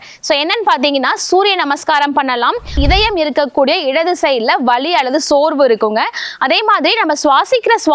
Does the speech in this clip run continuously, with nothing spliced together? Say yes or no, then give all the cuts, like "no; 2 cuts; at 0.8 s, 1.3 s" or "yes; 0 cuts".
no; 1 cut; at 2.8 s